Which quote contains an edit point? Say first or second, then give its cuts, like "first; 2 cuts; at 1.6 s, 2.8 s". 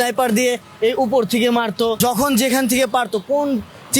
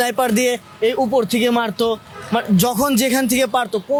first; 1 cut; at 2.0 s